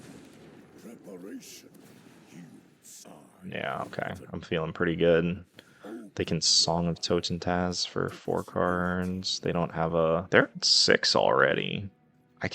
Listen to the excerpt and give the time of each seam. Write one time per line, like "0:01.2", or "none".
0:10.2